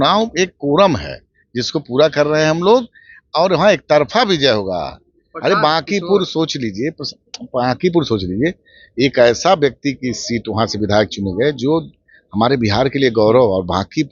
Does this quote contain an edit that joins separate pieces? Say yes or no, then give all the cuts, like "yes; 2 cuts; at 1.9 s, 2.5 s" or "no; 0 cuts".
no; 0 cuts